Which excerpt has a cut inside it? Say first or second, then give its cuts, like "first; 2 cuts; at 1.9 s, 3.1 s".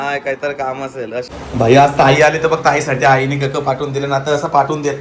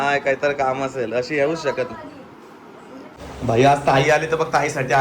first; 1 cut; at 1.3 s